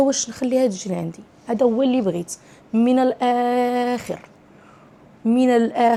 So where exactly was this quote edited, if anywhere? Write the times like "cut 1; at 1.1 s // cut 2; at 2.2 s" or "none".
none